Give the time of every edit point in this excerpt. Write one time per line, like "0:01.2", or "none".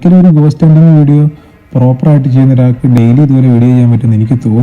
0:03.0